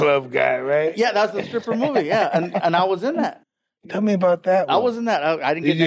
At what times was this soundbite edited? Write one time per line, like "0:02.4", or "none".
none